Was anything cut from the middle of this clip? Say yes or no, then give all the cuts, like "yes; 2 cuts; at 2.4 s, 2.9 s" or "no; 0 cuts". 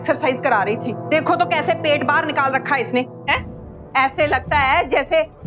no; 0 cuts